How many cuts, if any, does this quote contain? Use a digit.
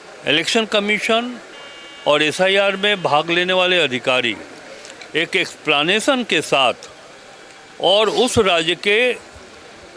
0